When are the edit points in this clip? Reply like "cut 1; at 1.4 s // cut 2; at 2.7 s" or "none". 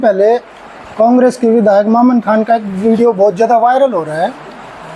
none

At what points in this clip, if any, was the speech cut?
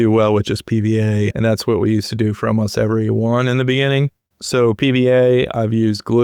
cut 1; at 1.3 s

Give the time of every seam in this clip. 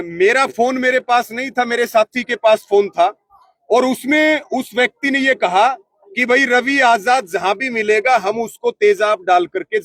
none

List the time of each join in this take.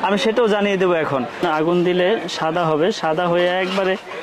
cut 1; at 1.4 s

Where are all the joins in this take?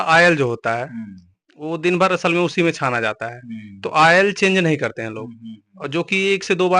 none

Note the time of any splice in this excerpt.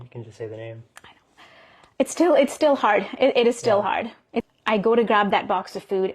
cut 1; at 4.4 s

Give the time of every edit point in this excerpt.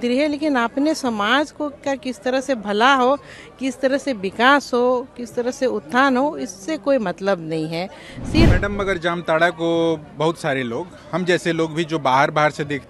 cut 1; at 8.5 s

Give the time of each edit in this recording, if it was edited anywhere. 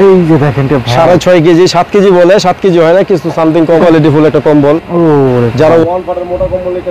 cut 1; at 3.8 s

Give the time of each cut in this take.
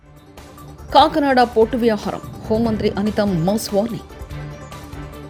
none

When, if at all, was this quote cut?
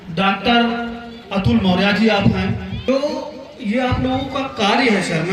cut 1; at 2.7 s

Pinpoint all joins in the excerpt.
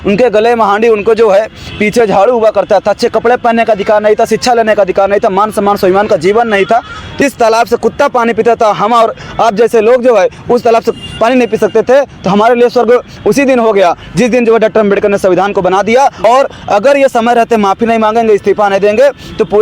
cut 1; at 7.2 s // cut 2; at 16.2 s

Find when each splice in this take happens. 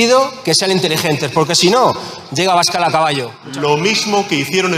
cut 1; at 3.3 s

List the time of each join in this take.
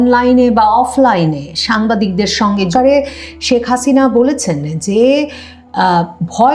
cut 1; at 2.7 s

